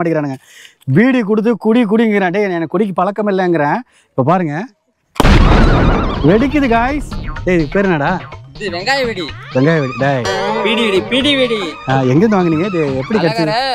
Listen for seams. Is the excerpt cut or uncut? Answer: uncut